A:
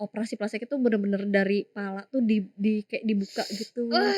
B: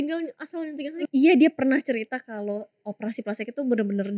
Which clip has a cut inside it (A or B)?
B